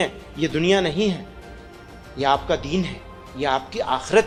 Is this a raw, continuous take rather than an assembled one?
yes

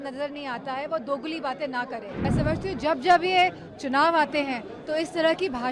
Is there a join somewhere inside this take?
yes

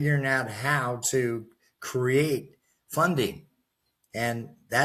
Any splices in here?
no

